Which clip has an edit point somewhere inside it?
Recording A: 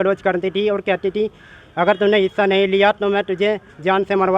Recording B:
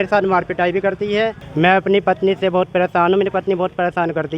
B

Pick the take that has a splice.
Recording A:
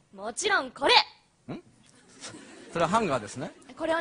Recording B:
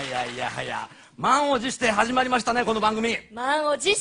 A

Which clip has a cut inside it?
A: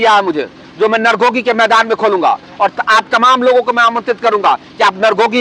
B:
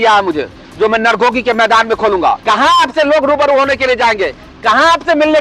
B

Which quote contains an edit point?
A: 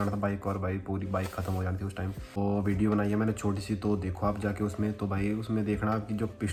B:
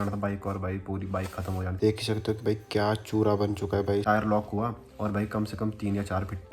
B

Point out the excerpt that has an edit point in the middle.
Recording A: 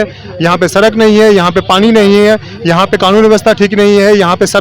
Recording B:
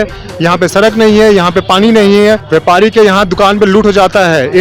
B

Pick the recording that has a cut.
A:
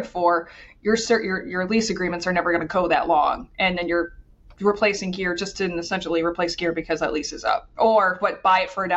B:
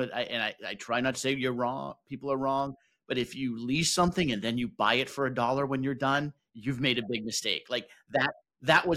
A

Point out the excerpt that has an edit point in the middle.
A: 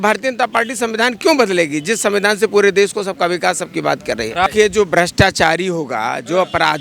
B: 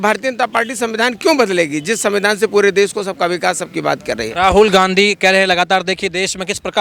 A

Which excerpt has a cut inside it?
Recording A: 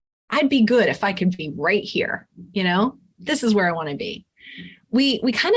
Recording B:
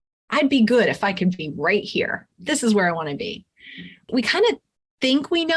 B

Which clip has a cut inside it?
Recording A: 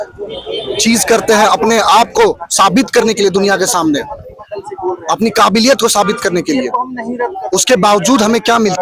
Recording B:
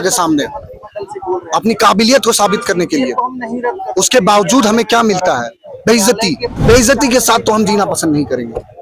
B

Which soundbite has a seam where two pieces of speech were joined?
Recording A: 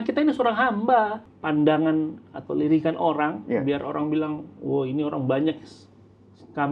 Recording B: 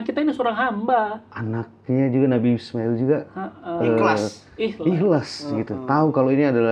A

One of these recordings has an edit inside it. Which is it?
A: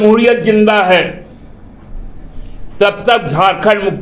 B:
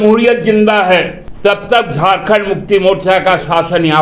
B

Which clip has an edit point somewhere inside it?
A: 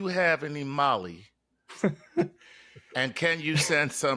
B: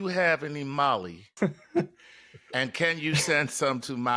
B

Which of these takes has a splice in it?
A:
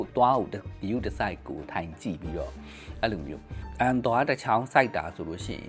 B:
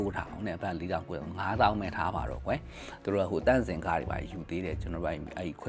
A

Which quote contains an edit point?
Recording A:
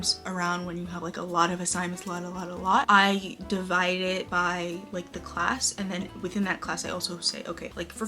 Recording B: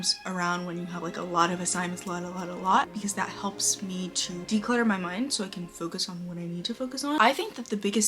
B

